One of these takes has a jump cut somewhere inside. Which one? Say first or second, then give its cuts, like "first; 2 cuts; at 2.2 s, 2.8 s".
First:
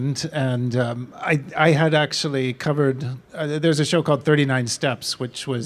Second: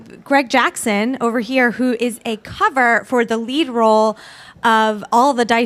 first; 1 cut; at 1.0 s